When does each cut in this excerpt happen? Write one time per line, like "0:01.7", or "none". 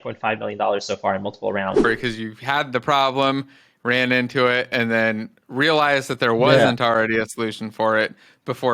0:01.8